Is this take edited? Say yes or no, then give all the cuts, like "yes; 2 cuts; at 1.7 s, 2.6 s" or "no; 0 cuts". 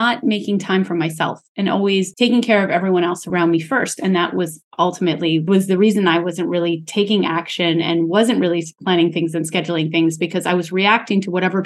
yes; 3 cuts; at 2.1 s, 3.3 s, 5.5 s